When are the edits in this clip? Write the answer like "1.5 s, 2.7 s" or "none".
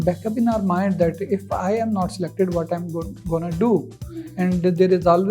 none